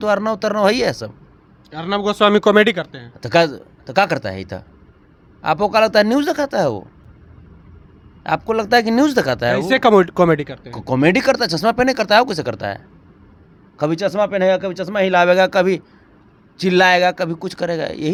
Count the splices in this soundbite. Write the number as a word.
zero